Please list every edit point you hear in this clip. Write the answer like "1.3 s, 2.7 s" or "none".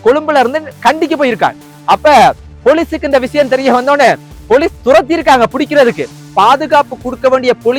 6.2 s